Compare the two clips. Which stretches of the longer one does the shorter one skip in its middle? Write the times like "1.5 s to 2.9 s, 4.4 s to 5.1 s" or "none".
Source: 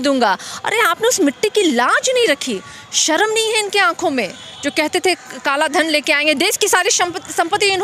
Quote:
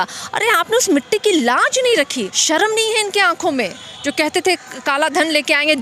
2.6 s to 2.9 s